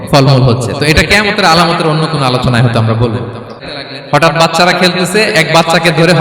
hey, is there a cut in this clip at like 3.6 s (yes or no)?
yes